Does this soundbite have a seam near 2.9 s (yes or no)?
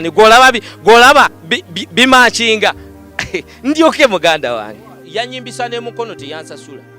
no